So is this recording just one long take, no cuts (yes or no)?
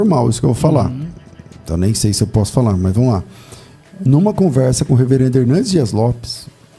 yes